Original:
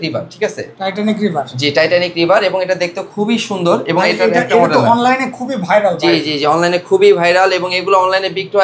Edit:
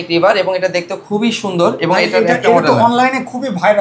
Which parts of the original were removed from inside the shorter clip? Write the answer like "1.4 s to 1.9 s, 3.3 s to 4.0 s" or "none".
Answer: none